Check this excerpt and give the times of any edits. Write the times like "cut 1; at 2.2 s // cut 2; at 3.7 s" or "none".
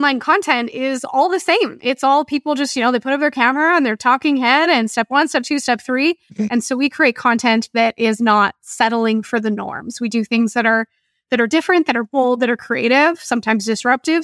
none